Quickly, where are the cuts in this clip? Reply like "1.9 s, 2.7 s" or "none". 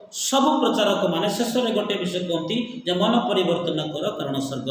none